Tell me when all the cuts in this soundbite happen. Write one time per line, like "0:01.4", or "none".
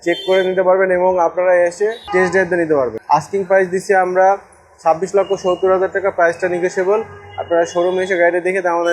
0:02.9